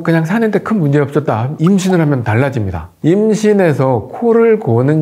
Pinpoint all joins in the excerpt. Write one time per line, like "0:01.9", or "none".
0:02.9